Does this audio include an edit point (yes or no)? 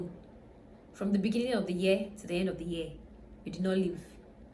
no